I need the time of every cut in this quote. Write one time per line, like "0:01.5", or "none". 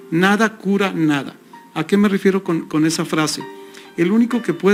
none